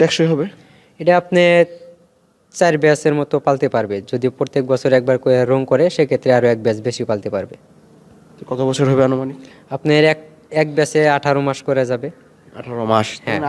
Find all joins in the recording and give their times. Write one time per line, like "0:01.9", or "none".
none